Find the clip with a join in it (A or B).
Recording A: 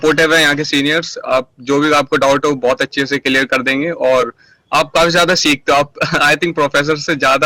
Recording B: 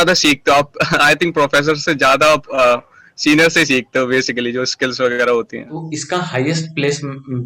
B